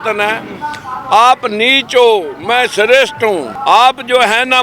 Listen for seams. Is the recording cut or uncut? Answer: cut